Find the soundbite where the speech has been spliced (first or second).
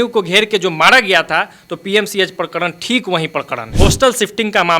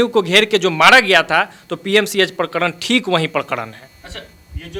first